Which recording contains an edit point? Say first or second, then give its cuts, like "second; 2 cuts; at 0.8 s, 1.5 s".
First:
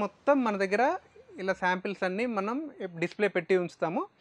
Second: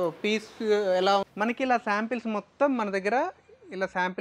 second; 1 cut; at 1.3 s